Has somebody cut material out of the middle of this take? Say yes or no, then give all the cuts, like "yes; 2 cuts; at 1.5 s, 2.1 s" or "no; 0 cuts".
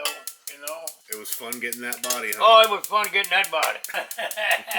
yes; 2 cuts; at 1.0 s, 3.9 s